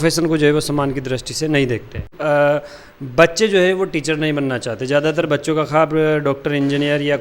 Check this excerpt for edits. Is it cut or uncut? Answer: cut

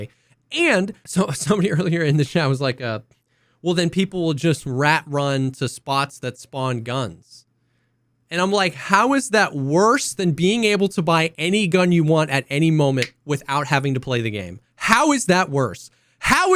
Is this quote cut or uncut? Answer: cut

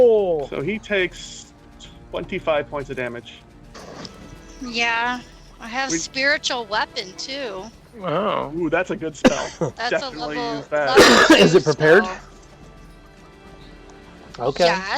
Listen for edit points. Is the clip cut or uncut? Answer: cut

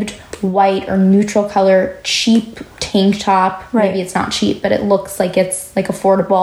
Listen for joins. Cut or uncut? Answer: uncut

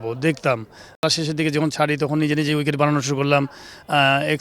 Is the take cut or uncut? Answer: cut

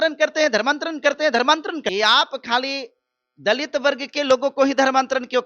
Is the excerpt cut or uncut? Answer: cut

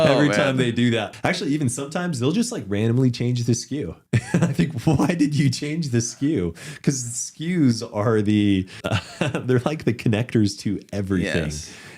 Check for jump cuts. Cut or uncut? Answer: cut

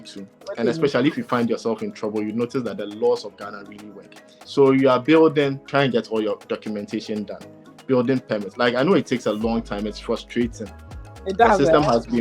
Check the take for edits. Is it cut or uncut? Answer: uncut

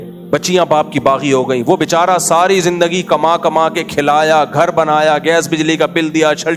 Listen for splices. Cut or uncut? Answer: uncut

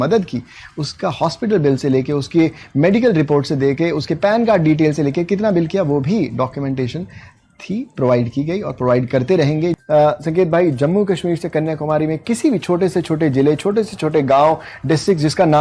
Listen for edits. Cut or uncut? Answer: cut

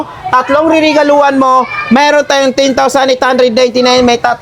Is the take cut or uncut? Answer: uncut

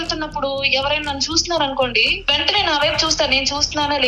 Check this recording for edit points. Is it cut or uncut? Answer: cut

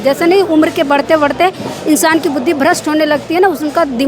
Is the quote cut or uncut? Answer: uncut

